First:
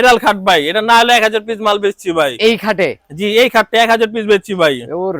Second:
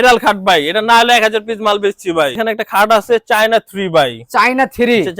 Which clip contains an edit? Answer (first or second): second